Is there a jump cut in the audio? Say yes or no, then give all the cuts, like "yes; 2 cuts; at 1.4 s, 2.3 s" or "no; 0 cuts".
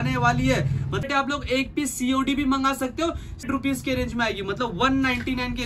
yes; 2 cuts; at 1.1 s, 3.5 s